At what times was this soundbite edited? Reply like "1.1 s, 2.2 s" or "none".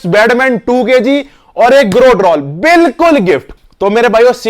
3.5 s